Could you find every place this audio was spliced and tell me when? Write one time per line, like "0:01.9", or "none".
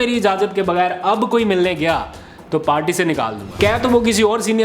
0:03.6